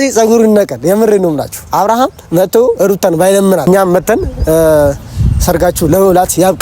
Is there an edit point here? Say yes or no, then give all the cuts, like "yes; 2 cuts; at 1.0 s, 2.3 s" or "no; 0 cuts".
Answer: yes; 1 cut; at 3.7 s